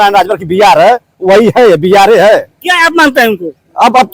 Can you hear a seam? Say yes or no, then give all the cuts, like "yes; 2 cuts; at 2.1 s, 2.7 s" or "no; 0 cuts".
no; 0 cuts